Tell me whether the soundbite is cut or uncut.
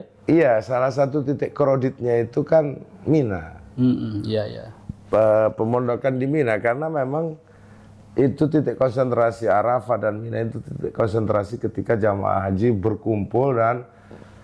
uncut